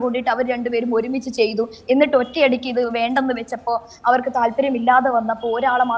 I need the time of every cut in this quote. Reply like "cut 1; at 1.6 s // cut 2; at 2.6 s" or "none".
none

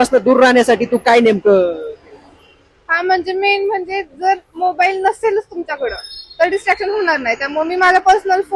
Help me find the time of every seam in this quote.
none

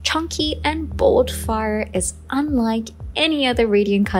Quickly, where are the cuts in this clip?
none

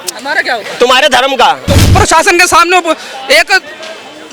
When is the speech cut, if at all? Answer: cut 1; at 1.9 s

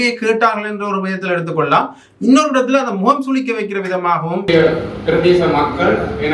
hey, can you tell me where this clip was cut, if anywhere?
cut 1; at 4.5 s

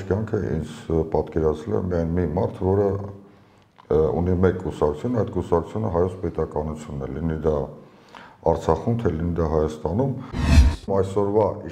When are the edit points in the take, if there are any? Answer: cut 1; at 10.6 s

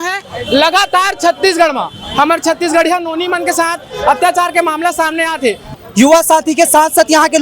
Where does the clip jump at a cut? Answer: cut 1; at 5.7 s

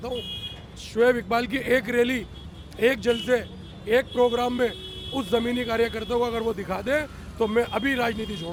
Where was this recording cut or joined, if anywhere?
none

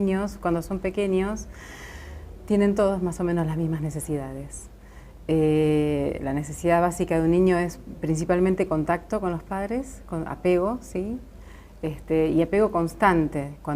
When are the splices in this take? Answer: cut 1; at 10.1 s

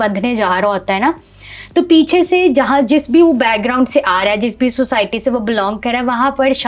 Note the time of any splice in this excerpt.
none

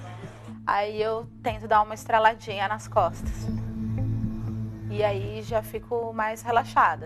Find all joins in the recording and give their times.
cut 1; at 5.5 s

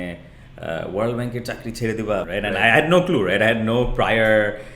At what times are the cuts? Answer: cut 1; at 2.3 s

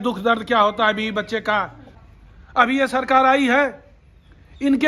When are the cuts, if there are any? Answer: cut 1; at 2.0 s

